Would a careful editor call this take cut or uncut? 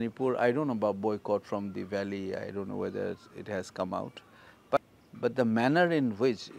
cut